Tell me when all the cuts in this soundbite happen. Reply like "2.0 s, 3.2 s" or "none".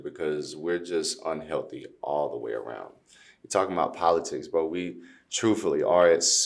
none